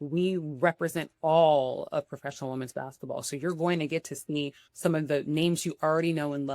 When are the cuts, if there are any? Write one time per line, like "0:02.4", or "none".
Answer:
none